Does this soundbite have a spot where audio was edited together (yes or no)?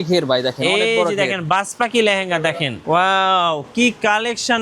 yes